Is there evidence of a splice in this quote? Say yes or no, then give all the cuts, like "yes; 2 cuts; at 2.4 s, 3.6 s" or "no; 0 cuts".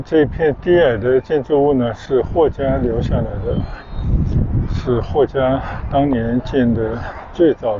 no; 0 cuts